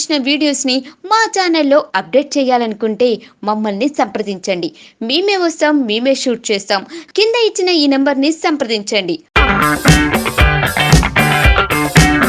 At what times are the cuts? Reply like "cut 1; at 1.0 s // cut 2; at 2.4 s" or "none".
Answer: none